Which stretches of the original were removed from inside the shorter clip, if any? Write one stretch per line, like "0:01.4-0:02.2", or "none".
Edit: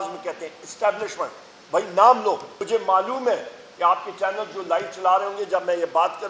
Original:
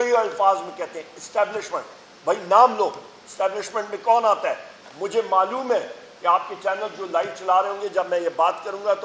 0:03.1-0:05.0

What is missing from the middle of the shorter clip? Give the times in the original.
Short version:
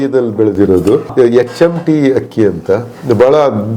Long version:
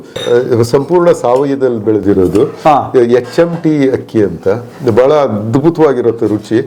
0:02.6-0:02.9

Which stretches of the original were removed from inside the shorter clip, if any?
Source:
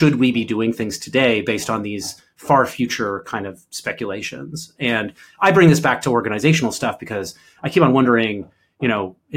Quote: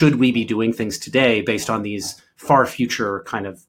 none

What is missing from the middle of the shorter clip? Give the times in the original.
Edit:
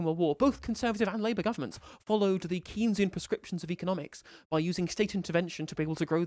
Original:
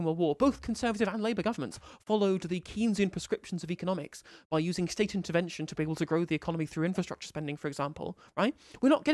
none

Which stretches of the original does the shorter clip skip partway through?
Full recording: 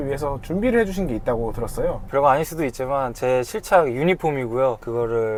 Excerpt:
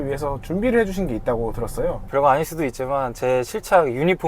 none

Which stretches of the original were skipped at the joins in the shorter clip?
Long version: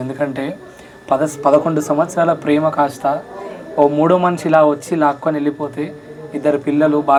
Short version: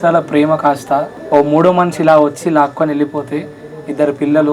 0:03.3-0:03.6

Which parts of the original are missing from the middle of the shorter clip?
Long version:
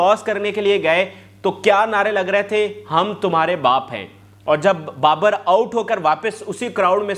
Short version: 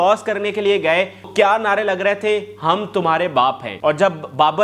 0:01.3-0:01.6
0:04.0-0:04.3

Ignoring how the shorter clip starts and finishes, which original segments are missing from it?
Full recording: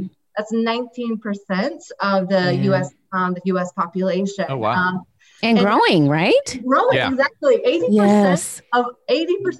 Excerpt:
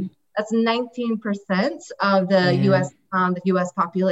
none

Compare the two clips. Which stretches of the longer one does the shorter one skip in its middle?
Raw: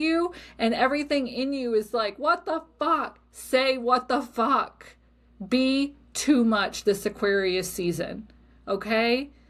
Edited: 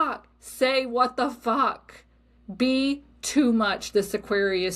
none

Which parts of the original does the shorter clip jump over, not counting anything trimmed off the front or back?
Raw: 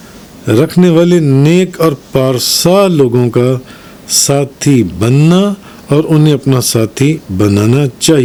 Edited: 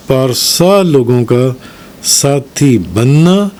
none

